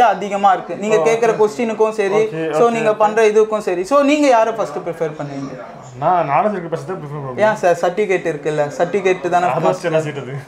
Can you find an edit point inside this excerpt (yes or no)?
no